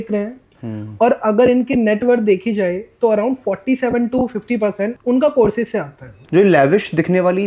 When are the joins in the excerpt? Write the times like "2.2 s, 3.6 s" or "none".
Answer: 5.0 s, 6.1 s